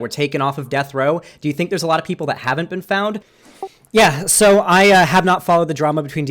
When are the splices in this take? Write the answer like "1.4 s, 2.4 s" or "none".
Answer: 3.3 s